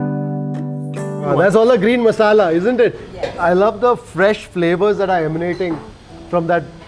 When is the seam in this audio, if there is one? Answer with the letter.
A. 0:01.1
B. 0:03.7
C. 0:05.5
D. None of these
D